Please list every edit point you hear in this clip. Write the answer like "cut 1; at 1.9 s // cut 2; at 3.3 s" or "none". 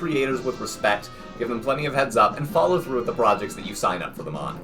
none